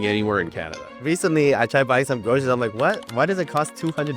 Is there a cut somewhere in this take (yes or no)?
yes